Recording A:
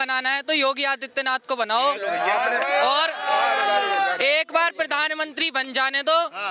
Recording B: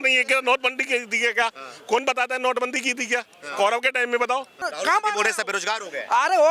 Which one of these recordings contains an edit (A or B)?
B